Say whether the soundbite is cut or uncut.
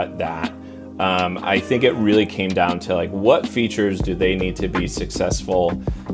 uncut